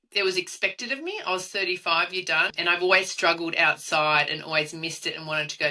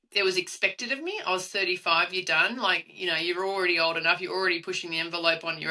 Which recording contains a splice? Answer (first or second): first